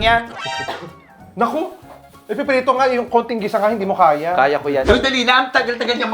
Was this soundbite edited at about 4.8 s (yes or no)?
yes